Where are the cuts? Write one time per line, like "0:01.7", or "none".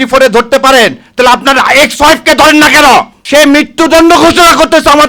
0:03.2